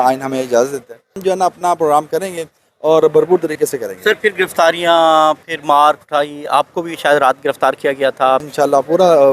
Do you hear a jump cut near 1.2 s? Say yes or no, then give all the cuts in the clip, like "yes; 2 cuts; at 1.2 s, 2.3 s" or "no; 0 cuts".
yes; 2 cuts; at 1.2 s, 8.4 s